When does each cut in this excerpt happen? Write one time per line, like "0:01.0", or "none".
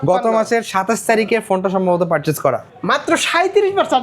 0:02.7